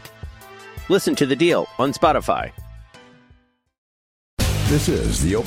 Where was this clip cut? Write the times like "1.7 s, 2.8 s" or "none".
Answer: 4.2 s